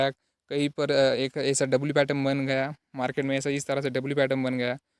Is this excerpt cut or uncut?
uncut